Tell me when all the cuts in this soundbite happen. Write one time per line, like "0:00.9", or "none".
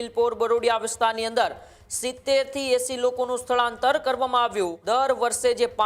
0:04.8